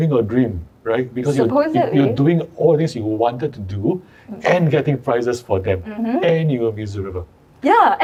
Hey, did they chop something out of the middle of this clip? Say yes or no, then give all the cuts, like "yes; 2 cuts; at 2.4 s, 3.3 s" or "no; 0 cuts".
no; 0 cuts